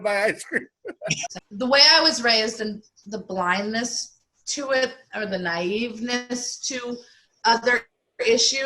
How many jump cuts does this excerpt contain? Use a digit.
1